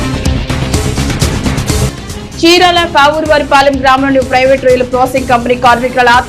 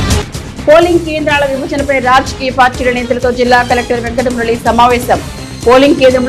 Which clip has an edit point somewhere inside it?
first; 1 cut; at 1.8 s

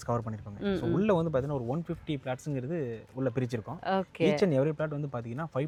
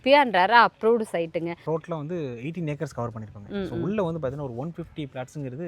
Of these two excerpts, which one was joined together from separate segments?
second; 1 cut; at 1.6 s

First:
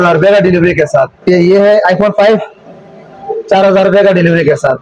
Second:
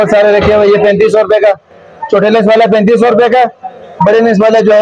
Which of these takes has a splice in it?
first; 1 cut; at 1.3 s

